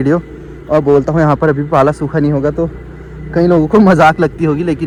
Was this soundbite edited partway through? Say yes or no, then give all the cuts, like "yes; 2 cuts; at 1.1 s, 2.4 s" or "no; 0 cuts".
no; 0 cuts